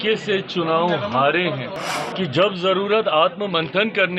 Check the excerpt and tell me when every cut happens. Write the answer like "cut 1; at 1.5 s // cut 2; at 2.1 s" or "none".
cut 1; at 1.8 s